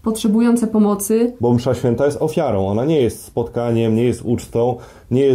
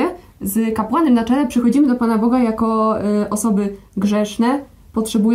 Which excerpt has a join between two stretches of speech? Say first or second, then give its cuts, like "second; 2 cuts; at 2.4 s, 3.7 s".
first; 1 cut; at 1.3 s